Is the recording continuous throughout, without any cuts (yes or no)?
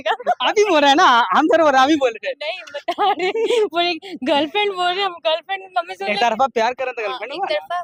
yes